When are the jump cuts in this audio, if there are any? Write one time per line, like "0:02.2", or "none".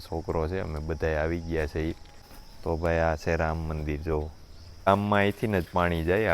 0:04.9